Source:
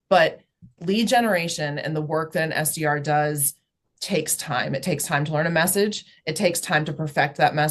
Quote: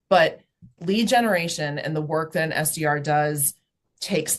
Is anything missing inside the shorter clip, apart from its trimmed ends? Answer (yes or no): no